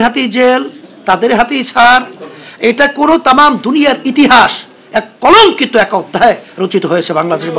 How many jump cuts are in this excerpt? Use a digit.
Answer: 0